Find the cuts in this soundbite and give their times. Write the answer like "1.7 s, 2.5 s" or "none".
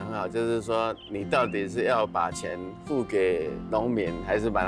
none